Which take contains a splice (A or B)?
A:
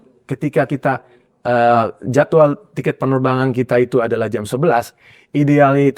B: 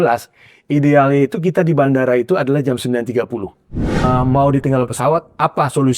B